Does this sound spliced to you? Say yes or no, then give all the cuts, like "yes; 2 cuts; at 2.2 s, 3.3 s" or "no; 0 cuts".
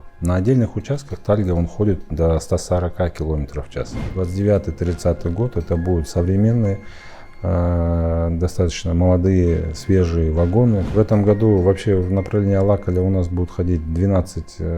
yes; 2 cuts; at 4.0 s, 10.9 s